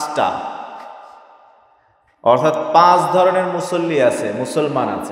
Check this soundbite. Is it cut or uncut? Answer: uncut